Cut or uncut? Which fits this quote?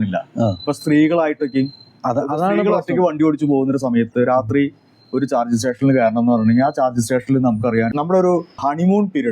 cut